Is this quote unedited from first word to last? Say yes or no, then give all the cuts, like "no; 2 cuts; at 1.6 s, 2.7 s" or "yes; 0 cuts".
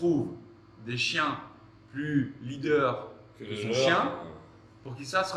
yes; 0 cuts